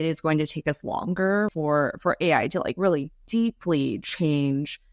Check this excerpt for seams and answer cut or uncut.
cut